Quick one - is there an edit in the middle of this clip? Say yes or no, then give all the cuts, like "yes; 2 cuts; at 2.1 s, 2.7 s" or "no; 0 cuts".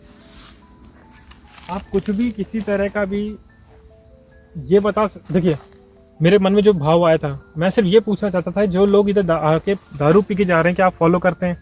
no; 0 cuts